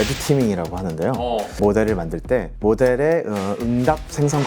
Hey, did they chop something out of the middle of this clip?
yes; 2 cuts; at 1.6 s, 2.5 s

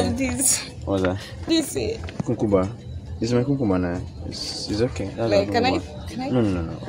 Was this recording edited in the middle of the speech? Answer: yes; 1 cut; at 1.3 s

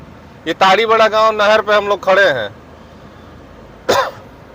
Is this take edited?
no; 0 cuts

